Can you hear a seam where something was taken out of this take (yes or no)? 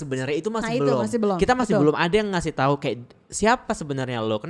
no